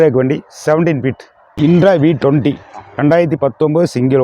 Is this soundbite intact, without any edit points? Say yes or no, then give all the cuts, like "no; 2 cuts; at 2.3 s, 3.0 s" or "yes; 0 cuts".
no; 1 cut; at 1.6 s